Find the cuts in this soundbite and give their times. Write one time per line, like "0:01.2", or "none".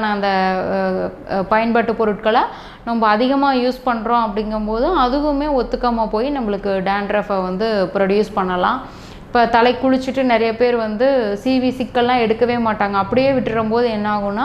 none